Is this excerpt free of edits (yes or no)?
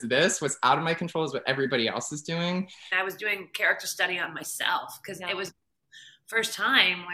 no